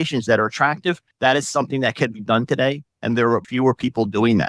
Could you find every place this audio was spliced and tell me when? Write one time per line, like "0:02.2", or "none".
0:01.1
0:03.5